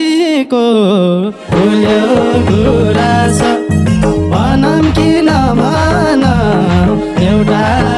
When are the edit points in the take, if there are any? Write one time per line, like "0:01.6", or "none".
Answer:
none